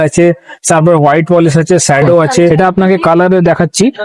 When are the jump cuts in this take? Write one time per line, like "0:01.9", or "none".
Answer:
0:02.5

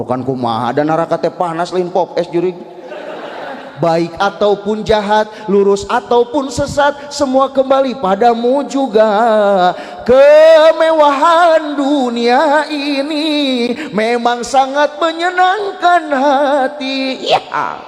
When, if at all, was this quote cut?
0:03.7

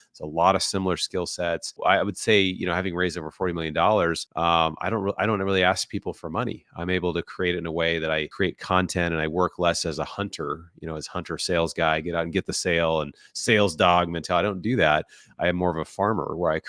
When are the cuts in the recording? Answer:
0:01.8
0:04.2
0:08.3

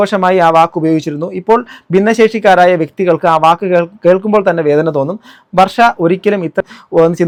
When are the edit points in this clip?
none

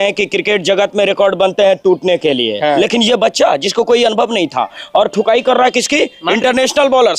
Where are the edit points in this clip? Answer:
0:02.8

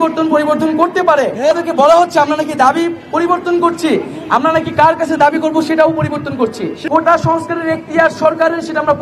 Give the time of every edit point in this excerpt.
0:01.5
0:06.7

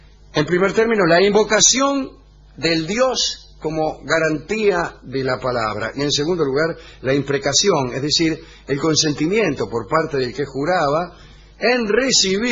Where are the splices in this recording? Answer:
0:10.4

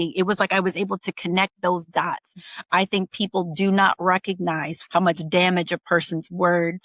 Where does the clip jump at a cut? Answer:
0:02.3

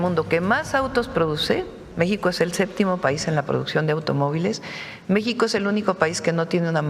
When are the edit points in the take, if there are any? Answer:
0:01.8

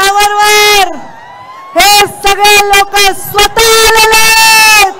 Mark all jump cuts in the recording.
none

